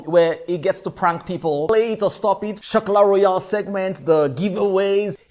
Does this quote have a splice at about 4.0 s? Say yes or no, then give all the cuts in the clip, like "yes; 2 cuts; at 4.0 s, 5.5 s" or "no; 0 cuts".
no; 2 cuts; at 1.7 s, 2.6 s